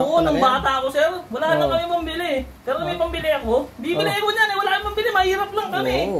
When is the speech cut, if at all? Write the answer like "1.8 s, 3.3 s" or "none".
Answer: none